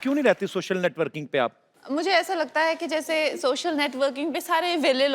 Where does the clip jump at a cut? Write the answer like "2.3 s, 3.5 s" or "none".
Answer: 1.7 s